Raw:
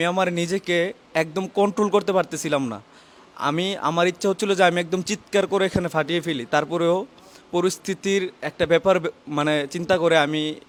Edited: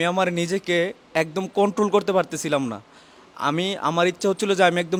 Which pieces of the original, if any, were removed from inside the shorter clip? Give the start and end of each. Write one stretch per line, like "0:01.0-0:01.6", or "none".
none